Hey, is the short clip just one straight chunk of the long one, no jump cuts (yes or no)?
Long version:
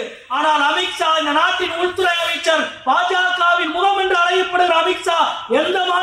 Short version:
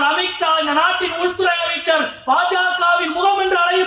yes